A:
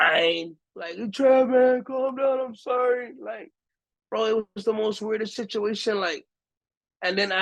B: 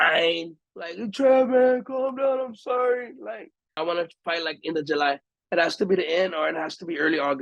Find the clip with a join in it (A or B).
B